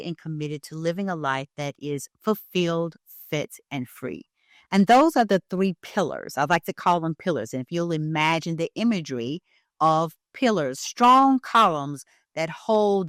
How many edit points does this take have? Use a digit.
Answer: 0